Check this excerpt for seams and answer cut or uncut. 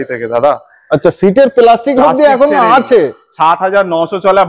uncut